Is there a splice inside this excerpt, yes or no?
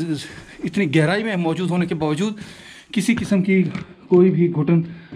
no